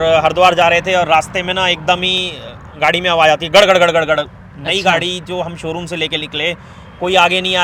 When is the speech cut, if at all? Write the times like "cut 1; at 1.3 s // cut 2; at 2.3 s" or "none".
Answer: none